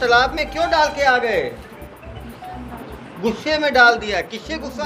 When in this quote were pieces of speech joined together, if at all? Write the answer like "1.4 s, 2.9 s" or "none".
none